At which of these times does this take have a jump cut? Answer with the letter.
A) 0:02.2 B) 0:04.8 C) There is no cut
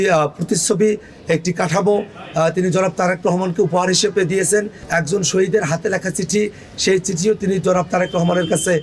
B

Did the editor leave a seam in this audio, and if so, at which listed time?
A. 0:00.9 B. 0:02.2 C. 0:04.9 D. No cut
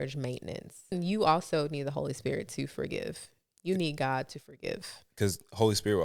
A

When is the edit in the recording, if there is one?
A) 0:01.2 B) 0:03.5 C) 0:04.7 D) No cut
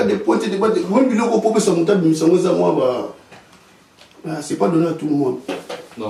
D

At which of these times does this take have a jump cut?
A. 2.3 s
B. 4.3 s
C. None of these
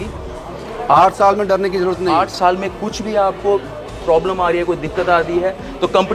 A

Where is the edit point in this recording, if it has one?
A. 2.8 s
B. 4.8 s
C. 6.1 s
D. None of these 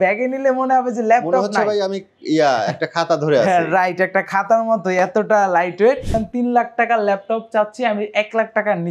C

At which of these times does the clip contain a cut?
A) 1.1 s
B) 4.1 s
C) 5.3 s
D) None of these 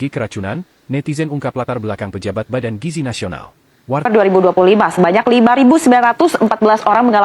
B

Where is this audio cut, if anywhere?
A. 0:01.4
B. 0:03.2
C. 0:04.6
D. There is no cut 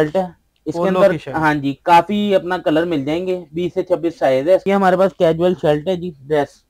C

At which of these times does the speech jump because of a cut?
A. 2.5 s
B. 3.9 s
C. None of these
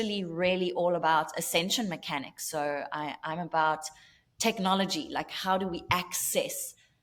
C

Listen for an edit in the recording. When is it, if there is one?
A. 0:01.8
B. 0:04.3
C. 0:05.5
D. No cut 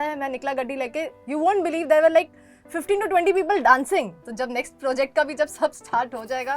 B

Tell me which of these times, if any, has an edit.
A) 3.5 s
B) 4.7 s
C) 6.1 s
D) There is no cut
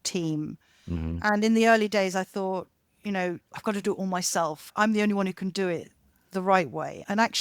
B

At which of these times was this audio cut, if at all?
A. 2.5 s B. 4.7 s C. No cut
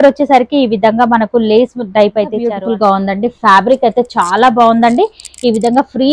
A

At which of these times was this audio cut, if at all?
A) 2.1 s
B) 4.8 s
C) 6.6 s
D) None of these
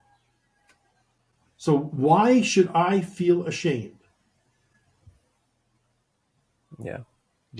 D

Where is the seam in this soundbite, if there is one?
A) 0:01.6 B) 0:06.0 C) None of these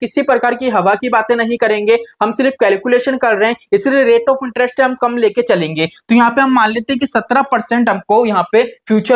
C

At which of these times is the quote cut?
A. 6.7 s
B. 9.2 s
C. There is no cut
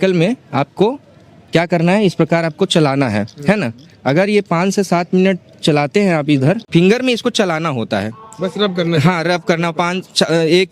A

